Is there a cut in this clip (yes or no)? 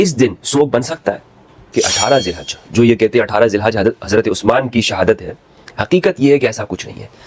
yes